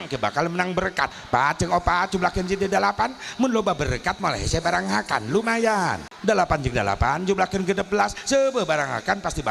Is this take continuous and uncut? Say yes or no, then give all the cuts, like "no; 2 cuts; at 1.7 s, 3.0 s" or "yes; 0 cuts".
no; 2 cuts; at 1.0 s, 6.1 s